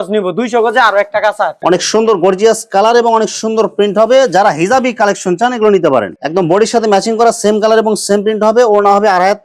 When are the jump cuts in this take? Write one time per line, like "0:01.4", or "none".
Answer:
0:01.5
0:06.2